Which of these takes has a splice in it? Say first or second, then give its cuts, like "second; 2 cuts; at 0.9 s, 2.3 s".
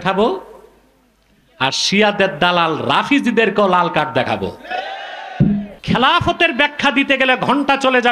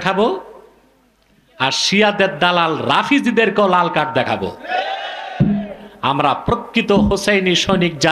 first; 1 cut; at 5.7 s